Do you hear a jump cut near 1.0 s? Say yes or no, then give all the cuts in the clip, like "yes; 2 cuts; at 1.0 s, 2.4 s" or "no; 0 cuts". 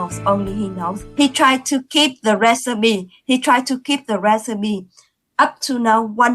yes; 1 cut; at 1.0 s